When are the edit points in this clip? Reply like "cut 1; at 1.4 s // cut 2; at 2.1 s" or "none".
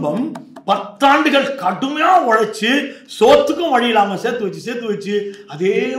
none